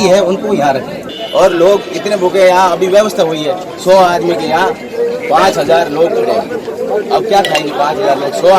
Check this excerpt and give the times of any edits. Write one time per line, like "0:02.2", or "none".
0:01.1